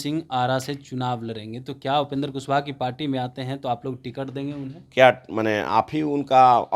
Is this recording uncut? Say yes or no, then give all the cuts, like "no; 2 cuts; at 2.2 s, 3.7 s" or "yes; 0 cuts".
yes; 0 cuts